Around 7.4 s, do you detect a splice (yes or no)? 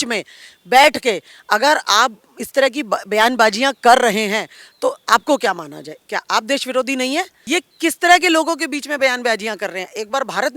yes